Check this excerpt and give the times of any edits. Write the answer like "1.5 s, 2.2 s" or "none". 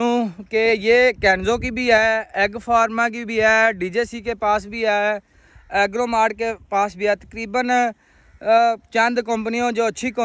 none

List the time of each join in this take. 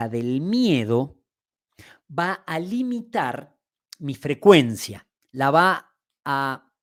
none

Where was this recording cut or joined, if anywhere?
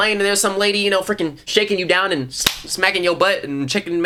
none

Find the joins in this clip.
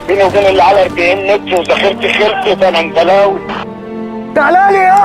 3.9 s

